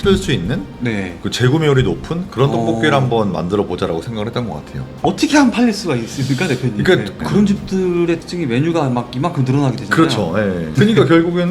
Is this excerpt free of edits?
no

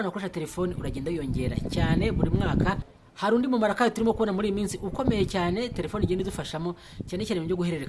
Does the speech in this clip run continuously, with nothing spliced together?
no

